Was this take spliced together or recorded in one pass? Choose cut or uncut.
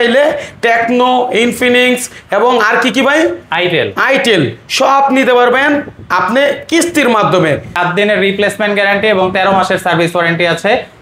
cut